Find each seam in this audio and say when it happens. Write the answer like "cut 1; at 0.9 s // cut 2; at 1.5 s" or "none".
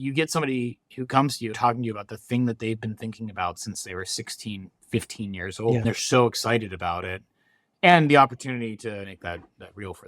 cut 1; at 1.5 s // cut 2; at 5.8 s // cut 3; at 9.1 s